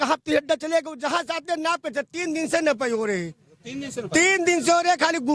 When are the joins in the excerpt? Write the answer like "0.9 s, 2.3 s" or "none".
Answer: none